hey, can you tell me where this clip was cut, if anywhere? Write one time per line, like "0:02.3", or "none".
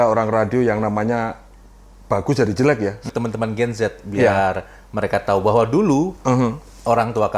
0:03.0